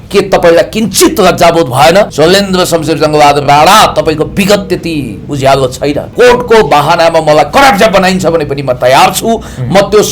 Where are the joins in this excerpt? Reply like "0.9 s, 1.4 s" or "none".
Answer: 2.1 s, 6.1 s